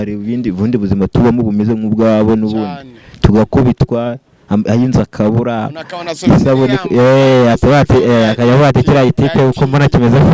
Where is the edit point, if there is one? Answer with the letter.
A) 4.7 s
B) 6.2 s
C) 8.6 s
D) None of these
D